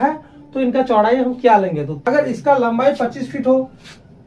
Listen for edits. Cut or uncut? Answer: cut